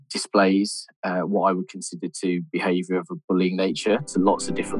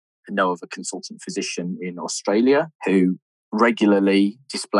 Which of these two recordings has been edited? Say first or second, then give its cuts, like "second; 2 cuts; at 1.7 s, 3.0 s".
second; 1 cut; at 2.8 s